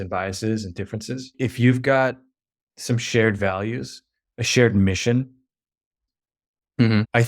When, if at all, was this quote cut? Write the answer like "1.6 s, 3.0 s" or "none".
1.3 s, 6.0 s